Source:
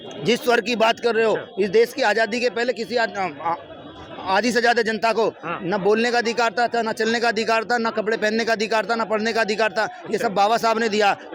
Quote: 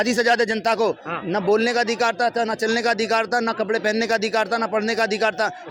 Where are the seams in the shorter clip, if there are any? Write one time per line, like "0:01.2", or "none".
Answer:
none